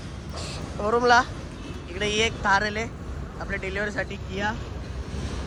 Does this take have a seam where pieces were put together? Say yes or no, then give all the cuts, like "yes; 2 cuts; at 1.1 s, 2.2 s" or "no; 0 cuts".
no; 0 cuts